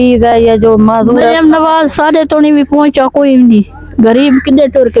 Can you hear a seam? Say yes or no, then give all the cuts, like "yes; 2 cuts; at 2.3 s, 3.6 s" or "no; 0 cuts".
no; 0 cuts